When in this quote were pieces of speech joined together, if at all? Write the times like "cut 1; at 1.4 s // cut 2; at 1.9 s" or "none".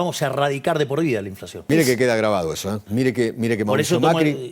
cut 1; at 1.7 s // cut 2; at 2.8 s